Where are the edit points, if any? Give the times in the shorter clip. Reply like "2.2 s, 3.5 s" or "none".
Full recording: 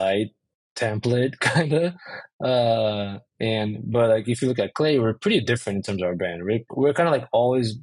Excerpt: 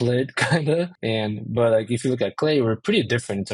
1.0 s